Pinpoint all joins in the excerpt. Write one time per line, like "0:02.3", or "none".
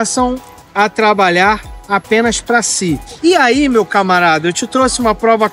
0:03.1